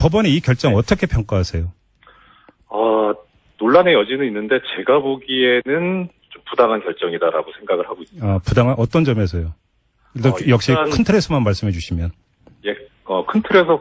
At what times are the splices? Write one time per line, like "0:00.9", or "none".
none